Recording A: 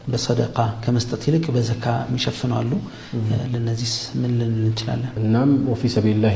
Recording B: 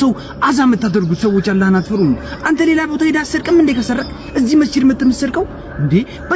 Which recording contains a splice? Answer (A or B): A